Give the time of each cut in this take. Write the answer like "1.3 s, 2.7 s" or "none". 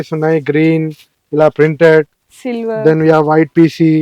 none